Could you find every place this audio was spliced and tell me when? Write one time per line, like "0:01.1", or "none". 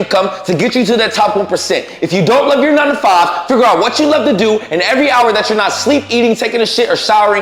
none